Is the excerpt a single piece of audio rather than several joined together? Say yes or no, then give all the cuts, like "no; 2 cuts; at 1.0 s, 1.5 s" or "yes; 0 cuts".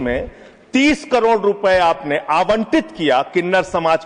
yes; 0 cuts